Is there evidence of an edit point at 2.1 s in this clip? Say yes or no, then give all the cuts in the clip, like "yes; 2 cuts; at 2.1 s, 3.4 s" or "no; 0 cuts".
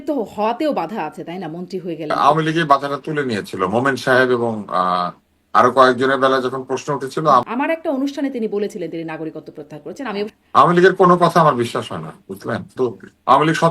yes; 4 cuts; at 2.1 s, 7.5 s, 10.3 s, 12.7 s